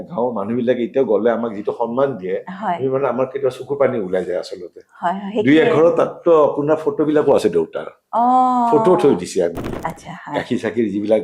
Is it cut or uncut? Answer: cut